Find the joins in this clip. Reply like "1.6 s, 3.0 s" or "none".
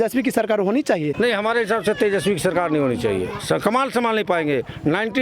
1.1 s